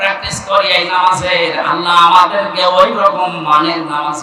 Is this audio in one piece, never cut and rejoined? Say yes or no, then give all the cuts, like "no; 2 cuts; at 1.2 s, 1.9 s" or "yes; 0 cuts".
yes; 0 cuts